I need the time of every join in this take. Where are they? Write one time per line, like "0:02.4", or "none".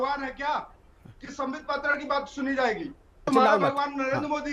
0:03.3